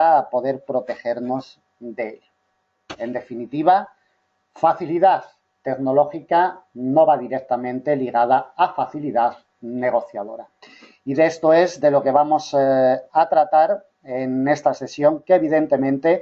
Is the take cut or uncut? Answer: cut